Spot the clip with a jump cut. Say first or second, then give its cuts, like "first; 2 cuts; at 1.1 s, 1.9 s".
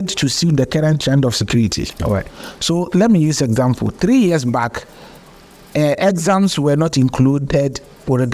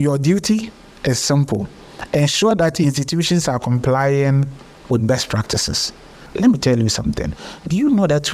second; 1 cut; at 6.3 s